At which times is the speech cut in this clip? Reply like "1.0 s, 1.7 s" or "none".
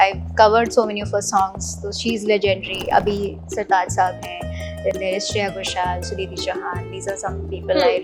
none